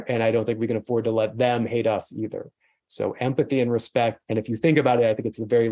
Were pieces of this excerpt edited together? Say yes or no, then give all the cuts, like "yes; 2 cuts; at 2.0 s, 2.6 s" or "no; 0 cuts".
yes; 1 cut; at 4.2 s